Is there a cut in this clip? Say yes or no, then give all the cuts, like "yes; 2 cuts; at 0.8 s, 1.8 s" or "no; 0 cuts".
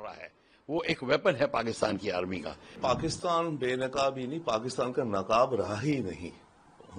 yes; 1 cut; at 2.8 s